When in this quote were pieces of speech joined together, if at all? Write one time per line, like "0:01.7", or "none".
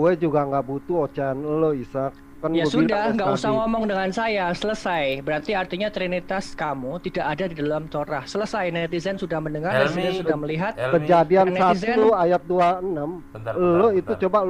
none